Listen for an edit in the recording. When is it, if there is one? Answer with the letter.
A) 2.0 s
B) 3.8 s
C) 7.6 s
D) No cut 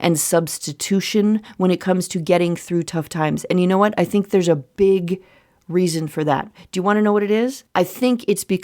C